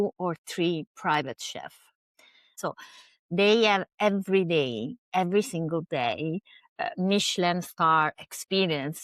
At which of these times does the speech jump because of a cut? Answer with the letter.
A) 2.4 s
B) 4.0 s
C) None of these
A